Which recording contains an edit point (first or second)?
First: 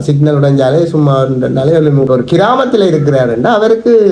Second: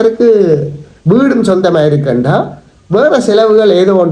first